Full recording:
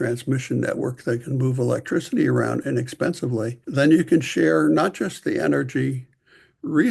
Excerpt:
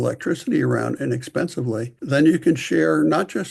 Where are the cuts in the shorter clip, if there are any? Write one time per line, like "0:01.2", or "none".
none